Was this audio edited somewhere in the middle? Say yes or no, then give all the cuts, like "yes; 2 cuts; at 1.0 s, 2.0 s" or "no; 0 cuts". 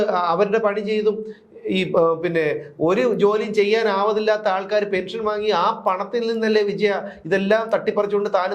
no; 0 cuts